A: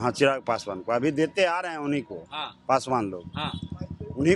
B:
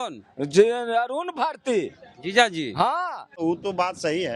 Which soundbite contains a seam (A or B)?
B